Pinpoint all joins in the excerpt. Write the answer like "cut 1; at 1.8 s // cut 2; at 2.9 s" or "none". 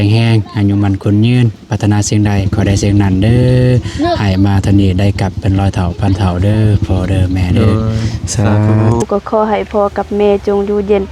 cut 1; at 9.0 s